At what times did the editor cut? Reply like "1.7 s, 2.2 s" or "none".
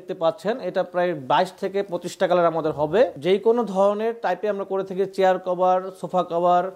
3.1 s